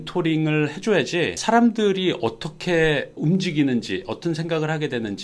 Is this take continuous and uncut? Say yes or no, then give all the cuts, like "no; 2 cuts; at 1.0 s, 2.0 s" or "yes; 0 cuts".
yes; 0 cuts